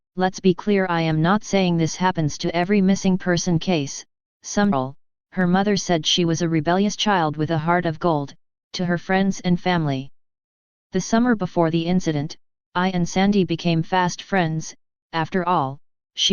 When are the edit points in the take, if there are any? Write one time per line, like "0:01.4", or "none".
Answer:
none

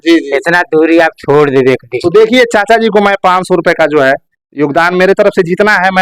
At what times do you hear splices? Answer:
none

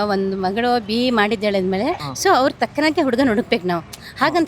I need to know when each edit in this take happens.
0:02.1

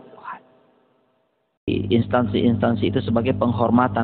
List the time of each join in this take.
0:01.7

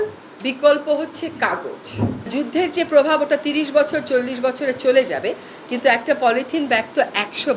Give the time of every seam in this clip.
0:02.3

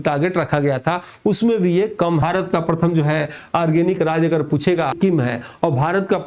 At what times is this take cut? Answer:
0:02.2
0:05.0

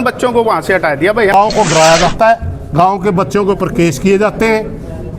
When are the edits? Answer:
0:01.3

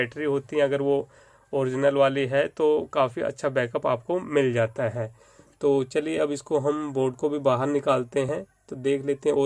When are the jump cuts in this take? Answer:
none

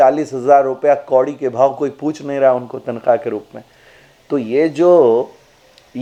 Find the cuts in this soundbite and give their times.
none

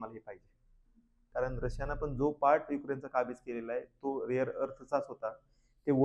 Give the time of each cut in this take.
0:01.2

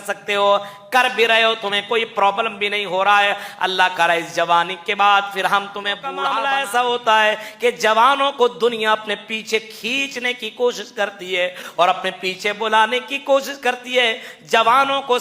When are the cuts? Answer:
0:06.2

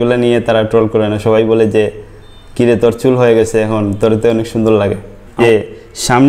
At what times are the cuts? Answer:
0:05.4

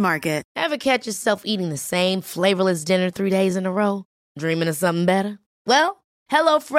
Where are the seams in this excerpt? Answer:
none

